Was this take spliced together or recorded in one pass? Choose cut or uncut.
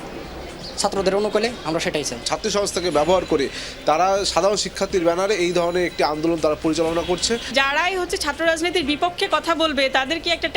cut